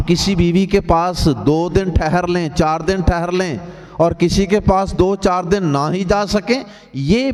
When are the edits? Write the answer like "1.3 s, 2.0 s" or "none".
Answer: none

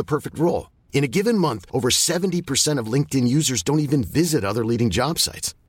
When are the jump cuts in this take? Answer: none

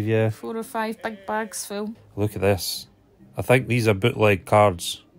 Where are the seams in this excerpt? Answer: 2.0 s

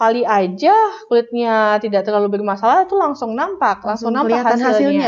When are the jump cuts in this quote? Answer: none

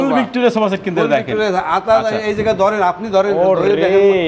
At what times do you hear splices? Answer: none

